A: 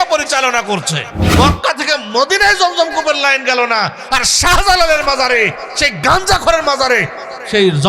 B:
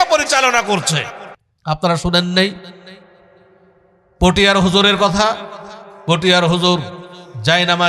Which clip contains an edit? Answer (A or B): A